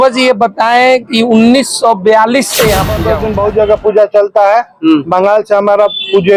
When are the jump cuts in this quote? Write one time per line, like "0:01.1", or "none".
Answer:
0:03.0